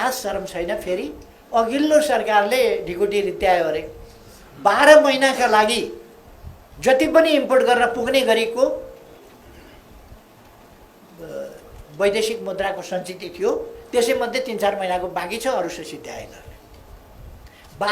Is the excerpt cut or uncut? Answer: uncut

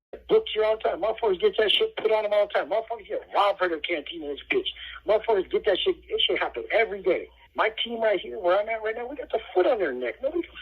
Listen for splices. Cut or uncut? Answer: cut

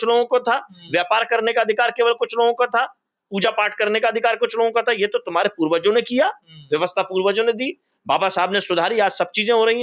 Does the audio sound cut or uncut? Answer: uncut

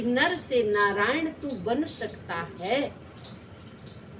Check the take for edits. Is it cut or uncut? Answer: uncut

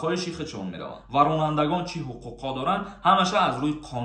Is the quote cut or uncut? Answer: cut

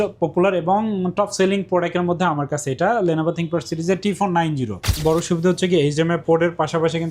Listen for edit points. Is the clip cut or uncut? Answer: cut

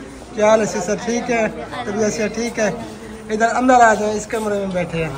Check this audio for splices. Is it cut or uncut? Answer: uncut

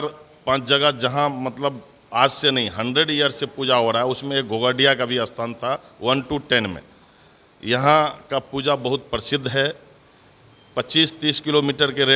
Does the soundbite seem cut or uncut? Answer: uncut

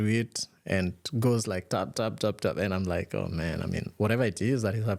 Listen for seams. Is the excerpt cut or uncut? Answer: uncut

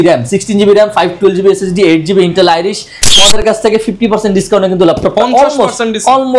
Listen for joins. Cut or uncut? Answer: cut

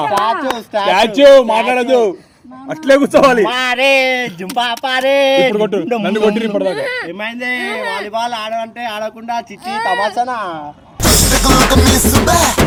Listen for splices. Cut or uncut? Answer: uncut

